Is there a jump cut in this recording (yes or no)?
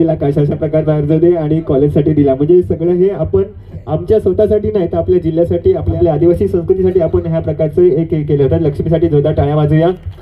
yes